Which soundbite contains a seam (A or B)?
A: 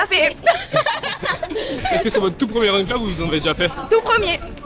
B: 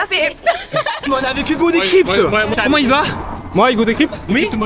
B